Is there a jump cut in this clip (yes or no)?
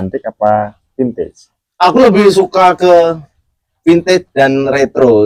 no